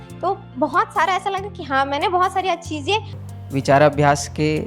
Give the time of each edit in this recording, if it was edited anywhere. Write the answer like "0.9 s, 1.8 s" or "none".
3.1 s

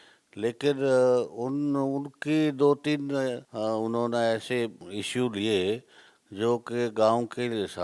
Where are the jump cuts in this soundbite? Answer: 3.5 s, 4.8 s

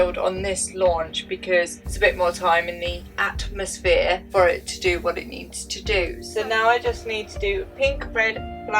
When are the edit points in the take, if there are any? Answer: 1.8 s, 6.2 s

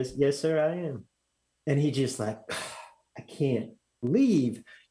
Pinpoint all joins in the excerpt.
3.7 s

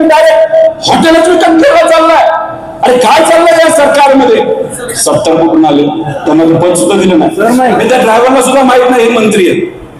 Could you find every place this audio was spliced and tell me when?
4.9 s, 7.8 s

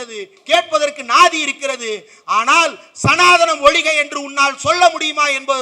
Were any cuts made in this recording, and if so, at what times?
none

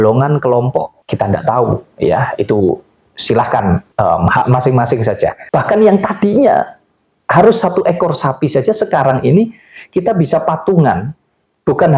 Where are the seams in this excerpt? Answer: 1.0 s, 3.9 s, 5.4 s

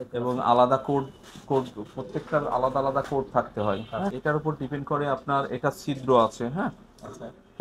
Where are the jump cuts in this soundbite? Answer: 4.2 s

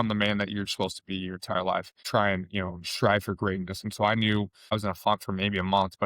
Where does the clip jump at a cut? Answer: 2.0 s

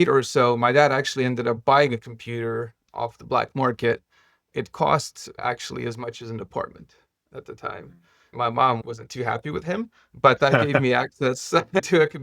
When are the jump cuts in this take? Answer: 8.3 s

